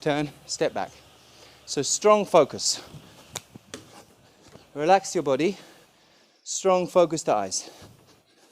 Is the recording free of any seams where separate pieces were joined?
yes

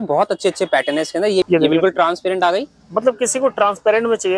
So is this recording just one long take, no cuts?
no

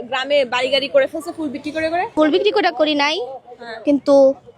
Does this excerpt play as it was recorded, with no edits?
no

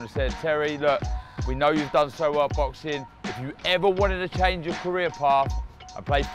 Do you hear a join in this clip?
no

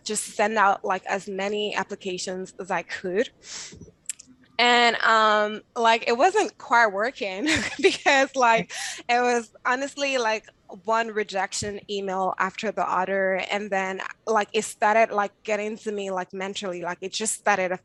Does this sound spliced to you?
no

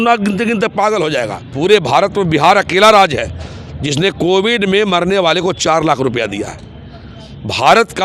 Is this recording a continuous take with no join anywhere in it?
no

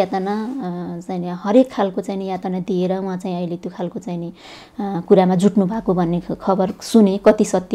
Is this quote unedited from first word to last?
yes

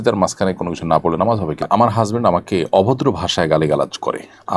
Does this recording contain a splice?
yes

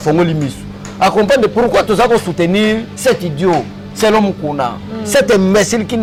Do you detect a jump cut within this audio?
no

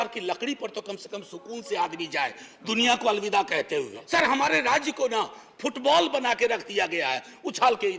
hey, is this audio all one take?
no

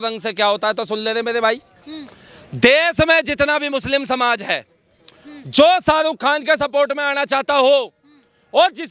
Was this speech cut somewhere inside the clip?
no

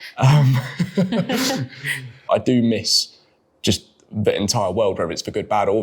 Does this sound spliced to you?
yes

